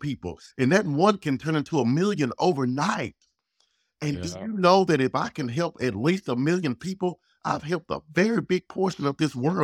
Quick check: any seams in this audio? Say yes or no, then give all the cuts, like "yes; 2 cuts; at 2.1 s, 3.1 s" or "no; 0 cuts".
no; 0 cuts